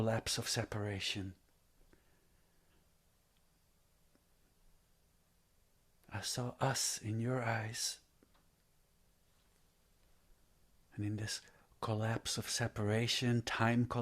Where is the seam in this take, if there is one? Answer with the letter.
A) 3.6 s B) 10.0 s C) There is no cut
B